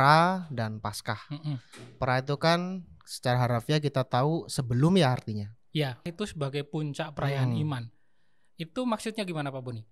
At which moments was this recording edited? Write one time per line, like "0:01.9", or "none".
0:06.1